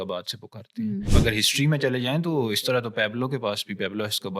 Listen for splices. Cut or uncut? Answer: cut